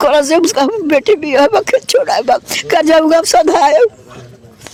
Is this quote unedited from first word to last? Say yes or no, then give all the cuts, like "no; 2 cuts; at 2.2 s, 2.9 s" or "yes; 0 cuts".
yes; 0 cuts